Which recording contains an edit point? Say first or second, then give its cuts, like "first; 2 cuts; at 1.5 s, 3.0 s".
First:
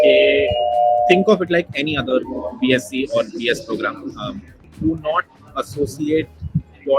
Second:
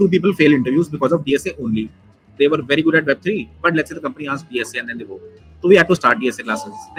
first; 1 cut; at 4.6 s